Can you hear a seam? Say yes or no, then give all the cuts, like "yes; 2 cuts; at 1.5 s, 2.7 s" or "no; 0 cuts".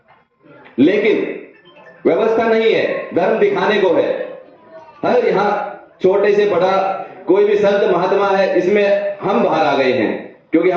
no; 0 cuts